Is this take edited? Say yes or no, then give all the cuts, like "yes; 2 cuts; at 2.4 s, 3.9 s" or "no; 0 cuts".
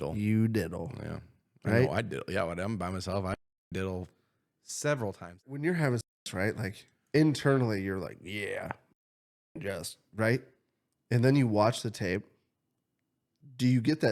yes; 1 cut; at 5.4 s